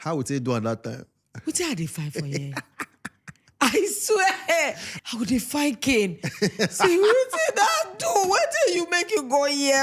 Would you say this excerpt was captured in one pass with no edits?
no; 1 cut; at 4.8 s

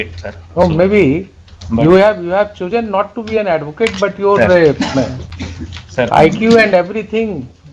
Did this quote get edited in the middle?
no; 0 cuts

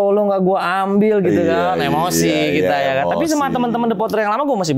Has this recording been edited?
no; 0 cuts

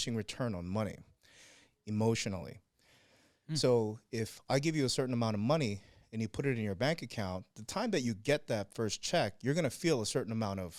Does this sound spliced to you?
no; 0 cuts

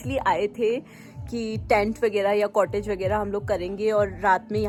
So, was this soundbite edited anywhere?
no; 0 cuts

